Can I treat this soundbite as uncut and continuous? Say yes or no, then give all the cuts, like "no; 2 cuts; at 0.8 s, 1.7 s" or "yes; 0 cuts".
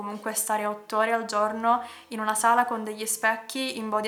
yes; 0 cuts